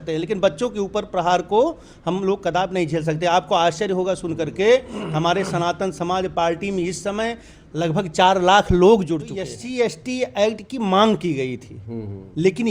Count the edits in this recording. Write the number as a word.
one